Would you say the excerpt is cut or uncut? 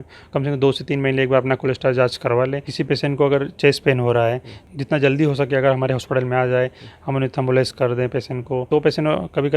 cut